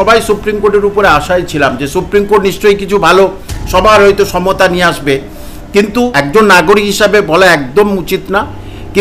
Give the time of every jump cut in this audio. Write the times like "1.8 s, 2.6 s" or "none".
6.3 s